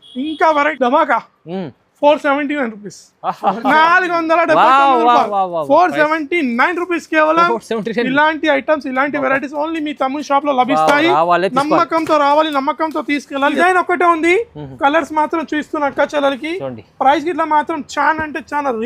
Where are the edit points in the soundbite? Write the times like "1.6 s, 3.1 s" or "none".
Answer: 0.7 s, 13.6 s